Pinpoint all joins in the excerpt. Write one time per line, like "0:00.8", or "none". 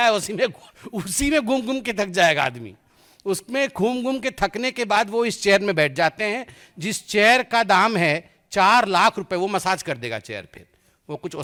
none

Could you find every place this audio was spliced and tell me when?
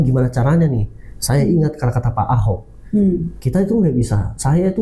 none

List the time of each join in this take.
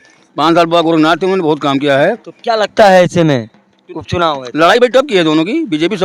none

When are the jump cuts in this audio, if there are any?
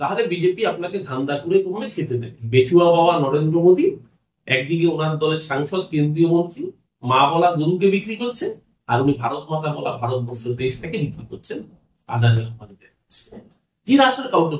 0:02.4
0:13.5

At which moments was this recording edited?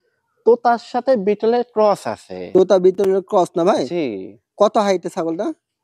none

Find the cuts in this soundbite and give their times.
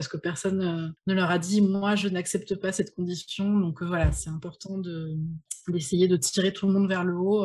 0:00.9
0:05.5

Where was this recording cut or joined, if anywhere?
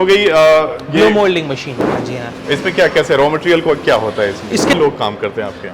0:02.0
0:04.7

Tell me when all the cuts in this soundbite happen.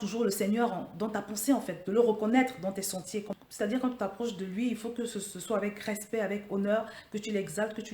0:03.3

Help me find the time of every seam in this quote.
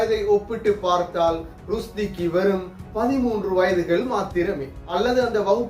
0:04.8

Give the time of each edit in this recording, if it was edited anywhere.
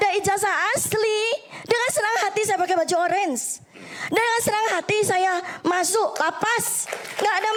none

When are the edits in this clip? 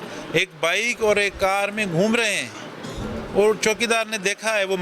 none

